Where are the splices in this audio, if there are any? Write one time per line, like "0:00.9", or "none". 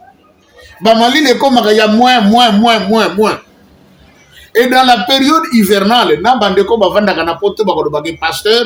none